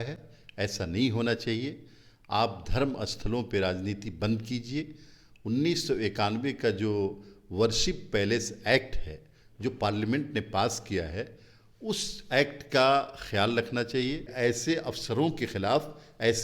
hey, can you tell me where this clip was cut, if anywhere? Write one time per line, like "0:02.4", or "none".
0:14.3